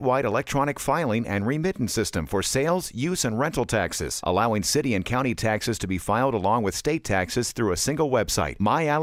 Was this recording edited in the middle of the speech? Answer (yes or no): no